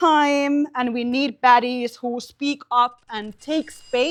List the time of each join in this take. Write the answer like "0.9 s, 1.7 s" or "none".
none